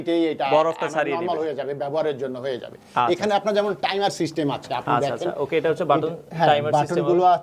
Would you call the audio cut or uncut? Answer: uncut